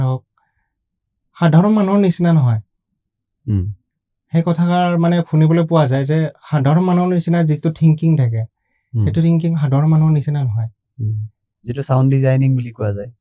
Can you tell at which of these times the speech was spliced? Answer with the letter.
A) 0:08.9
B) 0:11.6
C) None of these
B